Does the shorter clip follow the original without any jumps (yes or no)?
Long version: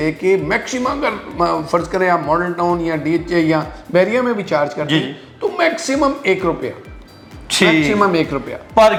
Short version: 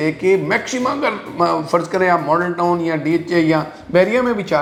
yes